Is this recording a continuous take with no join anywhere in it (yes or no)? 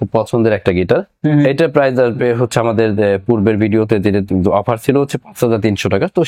yes